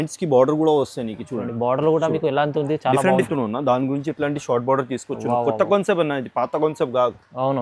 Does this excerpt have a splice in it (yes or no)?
yes